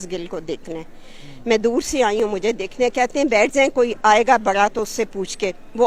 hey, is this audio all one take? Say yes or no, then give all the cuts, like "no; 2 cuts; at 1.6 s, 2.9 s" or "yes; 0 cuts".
yes; 0 cuts